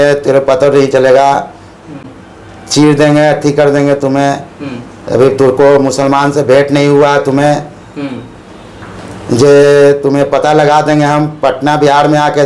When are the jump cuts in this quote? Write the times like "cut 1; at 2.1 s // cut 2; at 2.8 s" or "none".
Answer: none